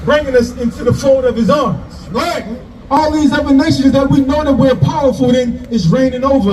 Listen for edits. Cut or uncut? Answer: cut